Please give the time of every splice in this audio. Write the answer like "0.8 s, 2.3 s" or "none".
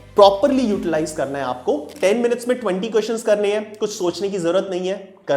1.9 s

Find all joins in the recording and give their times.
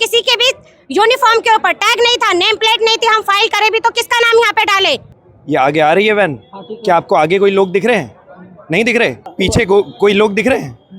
5.1 s, 9.2 s

